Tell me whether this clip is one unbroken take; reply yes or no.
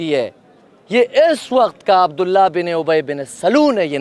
yes